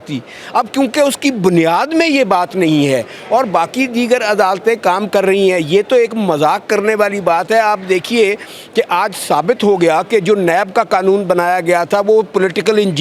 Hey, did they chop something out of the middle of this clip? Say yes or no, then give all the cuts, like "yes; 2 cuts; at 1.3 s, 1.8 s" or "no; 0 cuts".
no; 0 cuts